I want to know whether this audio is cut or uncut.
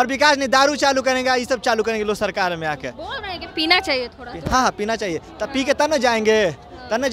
uncut